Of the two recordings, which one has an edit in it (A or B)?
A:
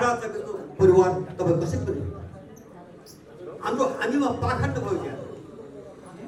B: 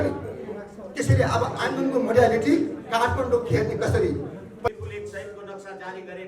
B